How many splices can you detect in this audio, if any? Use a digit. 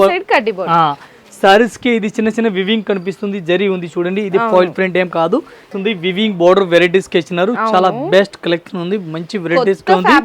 1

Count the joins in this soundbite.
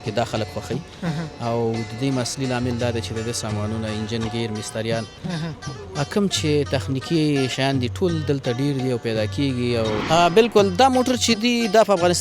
1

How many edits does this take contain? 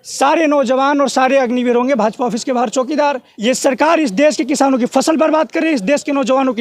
1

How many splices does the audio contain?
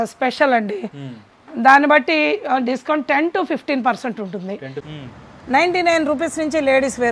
1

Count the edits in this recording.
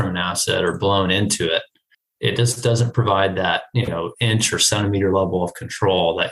0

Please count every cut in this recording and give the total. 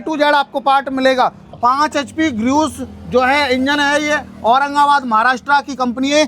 1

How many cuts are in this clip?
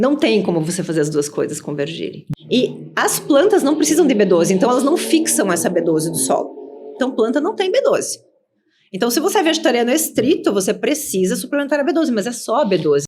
1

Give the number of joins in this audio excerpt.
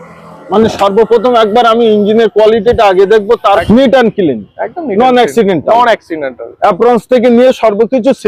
1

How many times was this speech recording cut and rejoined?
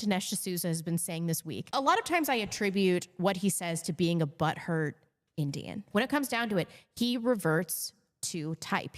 2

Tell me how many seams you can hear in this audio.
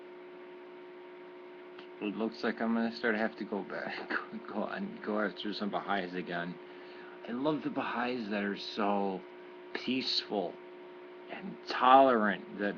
1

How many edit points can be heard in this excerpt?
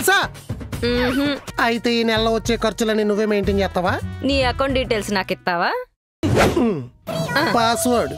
1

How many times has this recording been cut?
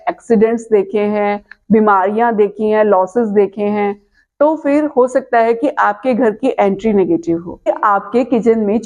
1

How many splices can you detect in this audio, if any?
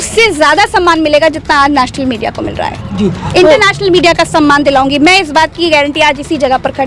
0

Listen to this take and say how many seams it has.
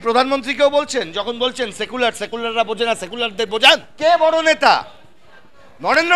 1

